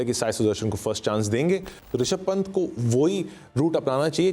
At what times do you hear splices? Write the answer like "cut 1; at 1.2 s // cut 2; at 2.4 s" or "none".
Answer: cut 1; at 1.8 s